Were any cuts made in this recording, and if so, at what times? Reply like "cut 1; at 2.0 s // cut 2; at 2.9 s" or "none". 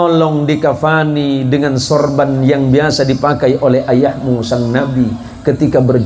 none